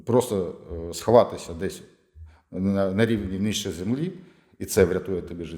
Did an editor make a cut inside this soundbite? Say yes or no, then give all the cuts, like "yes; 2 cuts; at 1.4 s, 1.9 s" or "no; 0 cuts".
no; 0 cuts